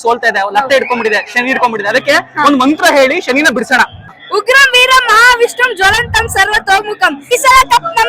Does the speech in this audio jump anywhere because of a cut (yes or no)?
yes